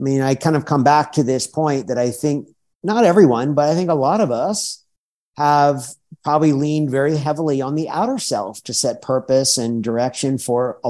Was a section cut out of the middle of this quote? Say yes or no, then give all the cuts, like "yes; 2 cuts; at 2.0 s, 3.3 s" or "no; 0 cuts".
no; 0 cuts